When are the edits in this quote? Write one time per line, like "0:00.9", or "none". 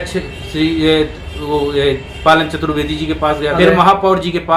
0:03.6